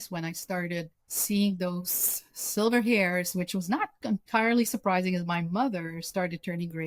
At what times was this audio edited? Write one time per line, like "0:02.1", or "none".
none